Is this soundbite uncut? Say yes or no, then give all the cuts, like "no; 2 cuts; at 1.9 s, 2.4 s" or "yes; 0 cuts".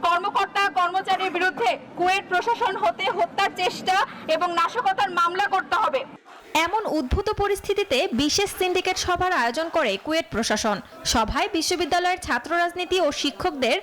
yes; 0 cuts